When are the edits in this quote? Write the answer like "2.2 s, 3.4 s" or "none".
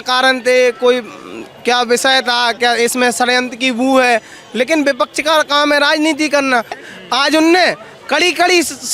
6.8 s